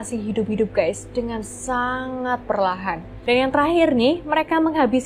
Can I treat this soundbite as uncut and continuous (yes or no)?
no